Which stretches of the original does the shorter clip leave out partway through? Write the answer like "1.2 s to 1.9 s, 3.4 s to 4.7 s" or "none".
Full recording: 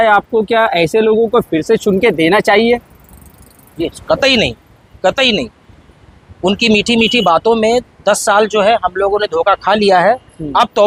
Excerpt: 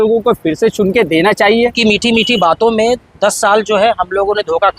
2.8 s to 6.6 s

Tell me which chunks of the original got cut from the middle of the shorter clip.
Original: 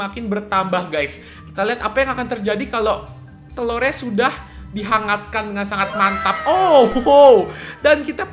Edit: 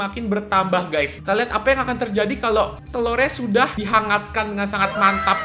1.2 s to 1.5 s, 3.1 s to 3.4 s, 4.4 s to 4.8 s

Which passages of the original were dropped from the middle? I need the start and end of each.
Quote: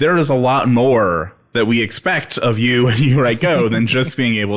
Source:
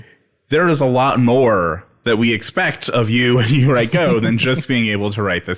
none

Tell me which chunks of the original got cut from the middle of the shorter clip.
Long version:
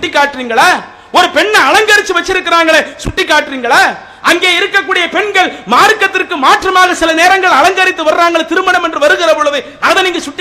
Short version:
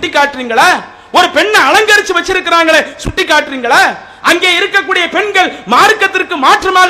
none

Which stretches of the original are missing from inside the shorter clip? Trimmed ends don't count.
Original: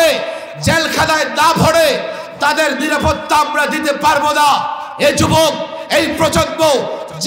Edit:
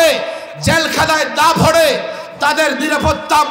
none

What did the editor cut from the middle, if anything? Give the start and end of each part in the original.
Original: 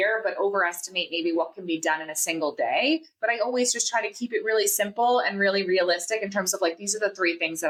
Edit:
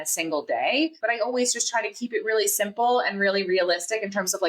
3.1 s to 3.2 s

